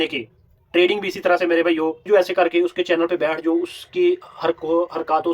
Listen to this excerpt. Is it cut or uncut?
cut